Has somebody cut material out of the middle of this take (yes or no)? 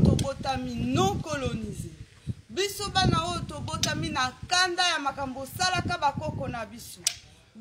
no